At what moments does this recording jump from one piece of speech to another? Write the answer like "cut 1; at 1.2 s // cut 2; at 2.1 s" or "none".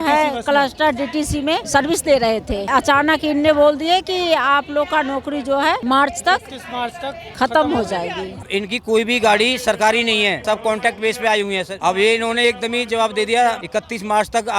cut 1; at 1.6 s // cut 2; at 2.7 s // cut 3; at 5.8 s // cut 4; at 7.2 s // cut 5; at 8.5 s // cut 6; at 10.4 s // cut 7; at 11.7 s // cut 8; at 13.6 s